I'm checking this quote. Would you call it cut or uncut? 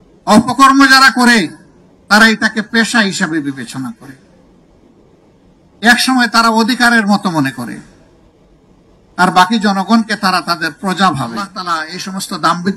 cut